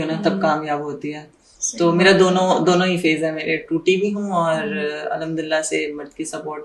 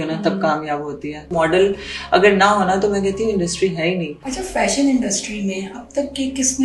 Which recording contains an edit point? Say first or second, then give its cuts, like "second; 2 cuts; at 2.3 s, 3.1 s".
second; 2 cuts; at 1.3 s, 4.2 s